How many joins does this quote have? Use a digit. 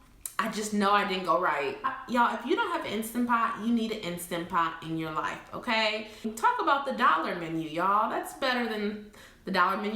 2